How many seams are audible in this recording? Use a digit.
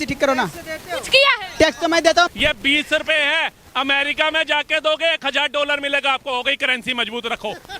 1